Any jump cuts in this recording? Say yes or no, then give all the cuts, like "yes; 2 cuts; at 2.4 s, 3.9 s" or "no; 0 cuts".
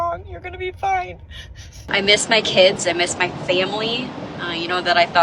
yes; 2 cuts; at 1.8 s, 2.8 s